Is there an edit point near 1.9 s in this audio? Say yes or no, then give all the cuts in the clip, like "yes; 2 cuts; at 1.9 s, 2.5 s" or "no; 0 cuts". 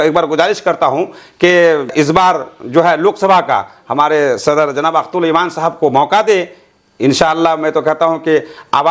yes; 1 cut; at 1.9 s